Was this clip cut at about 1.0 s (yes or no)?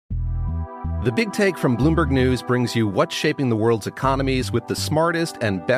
yes